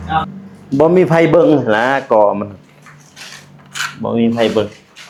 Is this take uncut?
yes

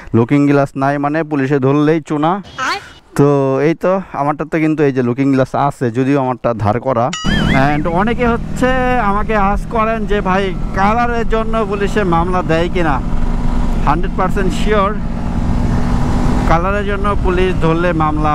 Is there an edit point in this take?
yes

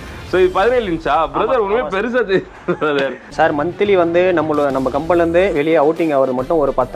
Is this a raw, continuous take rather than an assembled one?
no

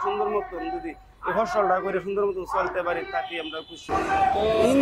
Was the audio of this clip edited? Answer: no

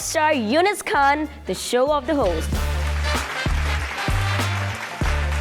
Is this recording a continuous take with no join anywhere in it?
no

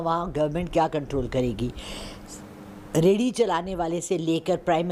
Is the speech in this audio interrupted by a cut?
no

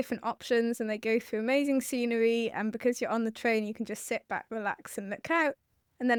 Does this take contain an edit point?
no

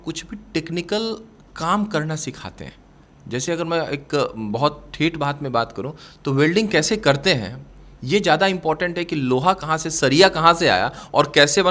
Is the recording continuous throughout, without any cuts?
yes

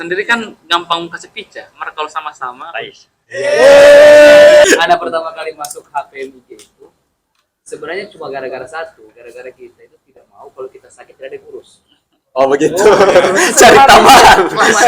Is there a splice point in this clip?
yes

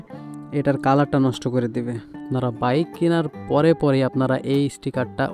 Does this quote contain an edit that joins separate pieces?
yes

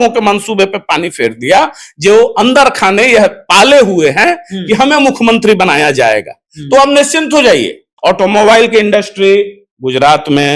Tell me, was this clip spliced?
yes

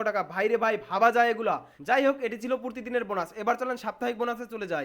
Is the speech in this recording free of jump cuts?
yes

